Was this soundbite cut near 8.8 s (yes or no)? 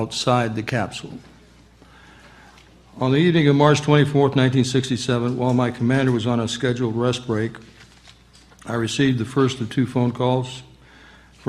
no